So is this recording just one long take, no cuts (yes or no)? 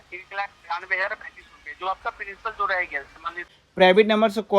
no